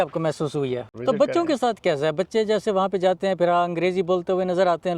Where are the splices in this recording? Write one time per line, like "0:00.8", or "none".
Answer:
0:00.9